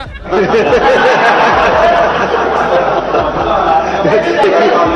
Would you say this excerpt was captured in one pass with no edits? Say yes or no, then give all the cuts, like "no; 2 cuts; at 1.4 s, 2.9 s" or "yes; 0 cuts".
yes; 0 cuts